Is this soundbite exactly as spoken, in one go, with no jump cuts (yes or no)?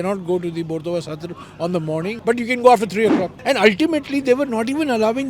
no